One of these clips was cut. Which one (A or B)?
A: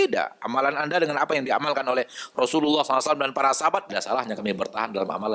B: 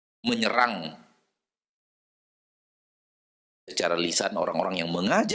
A